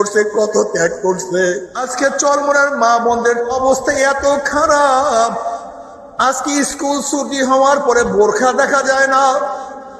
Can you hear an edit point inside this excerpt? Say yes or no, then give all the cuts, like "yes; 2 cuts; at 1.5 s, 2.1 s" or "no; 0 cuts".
yes; 2 cuts; at 1.8 s, 3.5 s